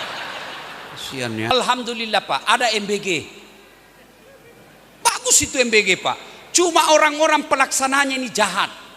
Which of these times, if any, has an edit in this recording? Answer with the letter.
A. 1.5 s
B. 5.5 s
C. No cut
A